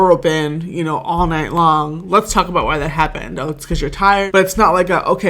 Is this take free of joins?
no; 1 cut; at 4.3 s

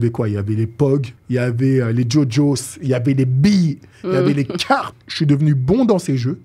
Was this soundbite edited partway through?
yes; 2 cuts; at 1.2 s, 5.0 s

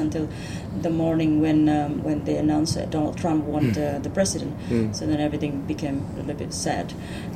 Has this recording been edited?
no; 0 cuts

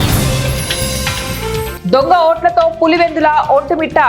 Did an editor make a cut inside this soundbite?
yes; 1 cut; at 1.7 s

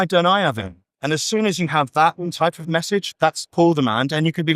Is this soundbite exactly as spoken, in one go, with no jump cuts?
no; 1 cut; at 3.5 s

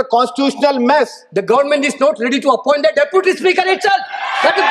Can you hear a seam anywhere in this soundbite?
yes; 1 cut; at 1.2 s

